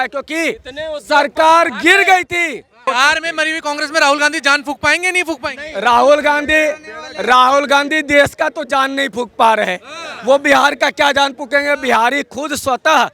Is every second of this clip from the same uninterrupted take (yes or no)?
no